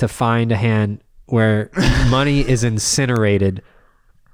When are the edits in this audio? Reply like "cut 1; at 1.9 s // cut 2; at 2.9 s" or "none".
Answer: none